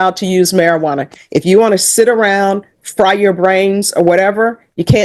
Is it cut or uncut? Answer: uncut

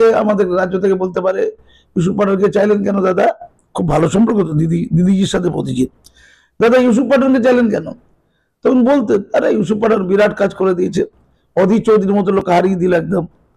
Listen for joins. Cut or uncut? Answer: uncut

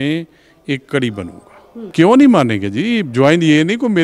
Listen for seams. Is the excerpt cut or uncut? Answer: cut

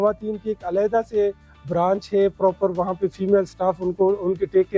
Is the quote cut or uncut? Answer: uncut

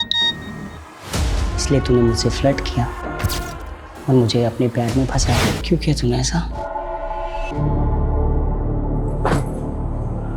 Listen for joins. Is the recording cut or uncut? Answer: cut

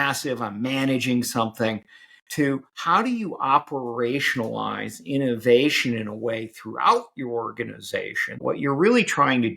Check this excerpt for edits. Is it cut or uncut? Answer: cut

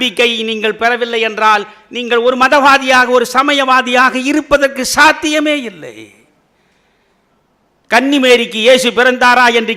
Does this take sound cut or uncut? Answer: uncut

